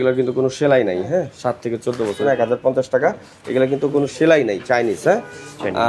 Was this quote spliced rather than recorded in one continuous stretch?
yes; 1 cut; at 2.2 s

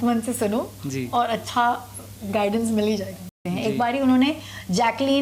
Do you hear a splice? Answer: yes; 1 cut; at 3.4 s

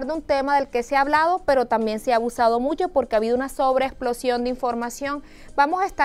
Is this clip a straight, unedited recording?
no; 1 cut; at 0.9 s

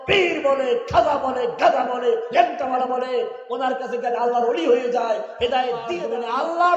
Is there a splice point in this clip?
yes; 1 cut; at 5.9 s

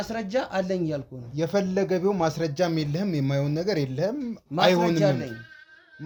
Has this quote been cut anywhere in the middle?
no; 0 cuts

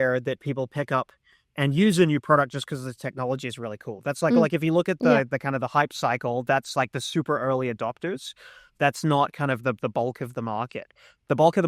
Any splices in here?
no; 0 cuts

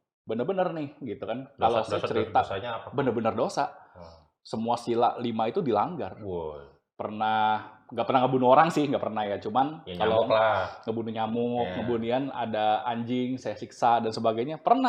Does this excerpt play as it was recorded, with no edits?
yes; 0 cuts

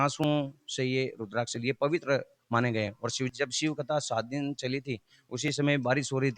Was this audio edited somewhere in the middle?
yes; 1 cut; at 3.3 s

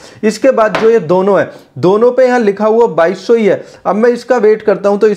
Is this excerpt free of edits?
yes; 0 cuts

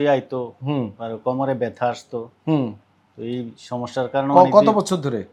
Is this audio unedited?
yes; 0 cuts

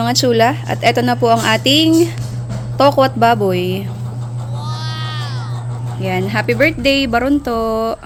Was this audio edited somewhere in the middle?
no; 0 cuts

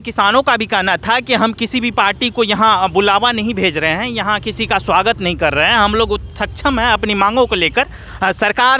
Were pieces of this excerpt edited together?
no; 0 cuts

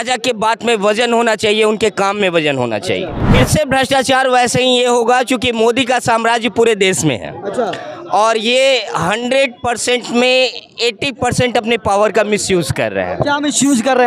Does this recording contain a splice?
yes; 1 cut; at 3.2 s

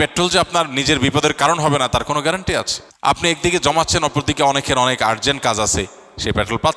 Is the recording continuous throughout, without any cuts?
no; 1 cut; at 3.2 s

